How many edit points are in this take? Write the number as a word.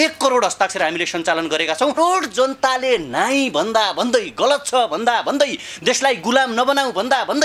one